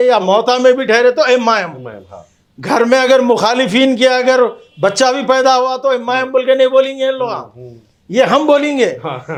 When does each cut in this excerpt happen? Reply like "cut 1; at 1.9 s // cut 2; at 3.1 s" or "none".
none